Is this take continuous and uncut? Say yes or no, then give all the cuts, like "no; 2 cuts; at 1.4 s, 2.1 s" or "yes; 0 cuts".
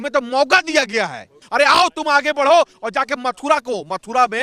no; 1 cut; at 1.4 s